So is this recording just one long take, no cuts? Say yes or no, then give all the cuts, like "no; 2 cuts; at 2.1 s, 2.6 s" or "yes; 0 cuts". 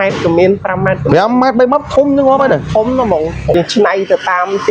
no; 1 cut; at 3.5 s